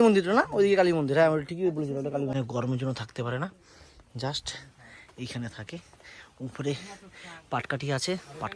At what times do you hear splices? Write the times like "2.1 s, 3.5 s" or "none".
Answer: 2.3 s